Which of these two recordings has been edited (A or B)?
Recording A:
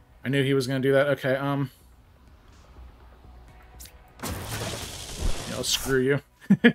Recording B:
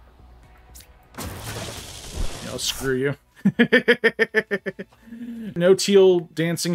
B